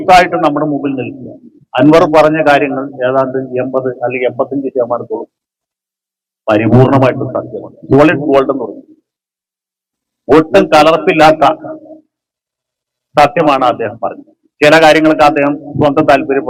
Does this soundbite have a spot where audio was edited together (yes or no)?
no